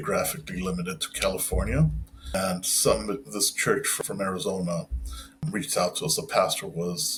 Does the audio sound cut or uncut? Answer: uncut